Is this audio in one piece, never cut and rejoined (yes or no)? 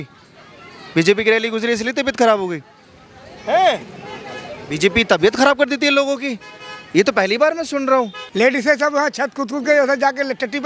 no